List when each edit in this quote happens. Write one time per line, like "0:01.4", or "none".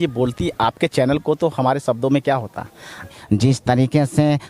0:03.1